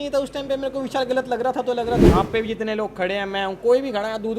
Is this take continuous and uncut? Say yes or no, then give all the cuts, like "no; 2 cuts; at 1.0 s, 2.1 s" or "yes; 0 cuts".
no; 1 cut; at 2.0 s